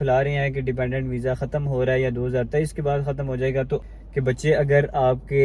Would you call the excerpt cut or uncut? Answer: cut